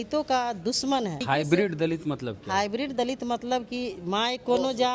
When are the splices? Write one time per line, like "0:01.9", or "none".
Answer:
0:01.2